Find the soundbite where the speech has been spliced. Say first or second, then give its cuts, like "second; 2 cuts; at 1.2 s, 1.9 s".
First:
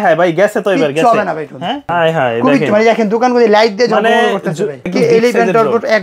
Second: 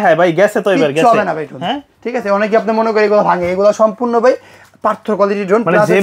first; 2 cuts; at 1.9 s, 4.9 s